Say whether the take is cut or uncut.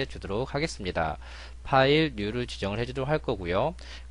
uncut